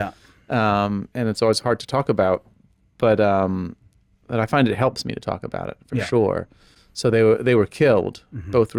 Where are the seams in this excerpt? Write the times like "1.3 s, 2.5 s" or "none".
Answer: none